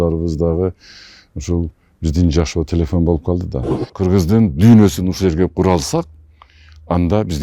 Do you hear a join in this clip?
yes; 1 cut; at 3.9 s

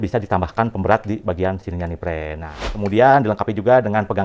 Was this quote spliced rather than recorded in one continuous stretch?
yes; 1 cut; at 2.6 s

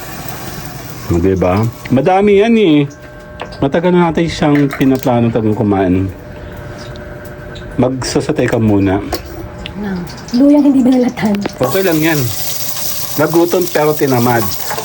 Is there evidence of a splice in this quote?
no; 0 cuts

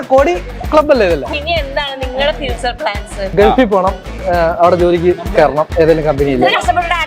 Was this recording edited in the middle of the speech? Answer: yes; 2 cuts; at 1.3 s, 3.3 s

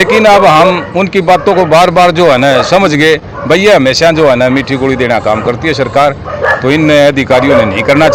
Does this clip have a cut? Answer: no; 0 cuts

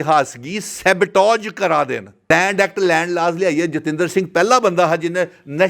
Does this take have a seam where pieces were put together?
yes; 1 cut; at 2.3 s

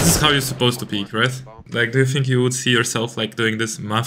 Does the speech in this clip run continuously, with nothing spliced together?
no; 1 cut; at 1.6 s

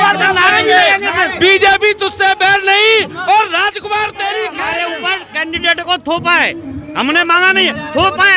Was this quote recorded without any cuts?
no; 1 cut; at 4.6 s

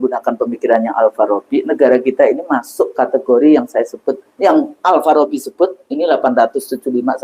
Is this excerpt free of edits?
yes; 0 cuts

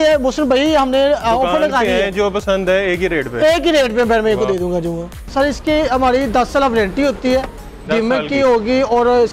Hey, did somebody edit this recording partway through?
yes; 1 cut; at 5.2 s

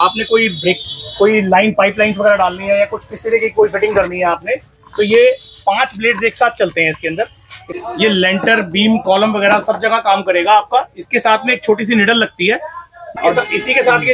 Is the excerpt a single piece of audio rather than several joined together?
no; 2 cuts; at 7.7 s, 13.1 s

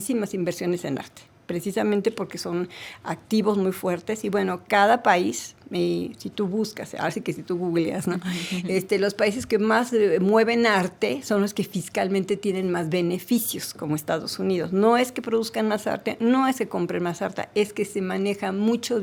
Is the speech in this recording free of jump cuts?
yes; 0 cuts

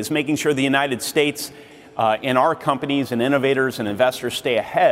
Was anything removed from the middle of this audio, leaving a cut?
no; 0 cuts

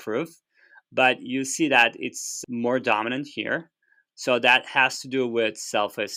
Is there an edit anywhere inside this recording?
no; 0 cuts

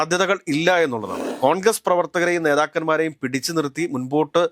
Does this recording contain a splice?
yes; 1 cut; at 1.2 s

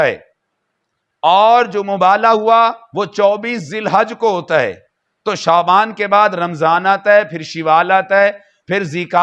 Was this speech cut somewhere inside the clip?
no; 0 cuts

